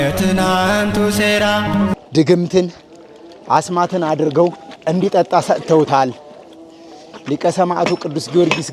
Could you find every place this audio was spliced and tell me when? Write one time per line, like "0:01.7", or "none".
0:02.0
0:04.7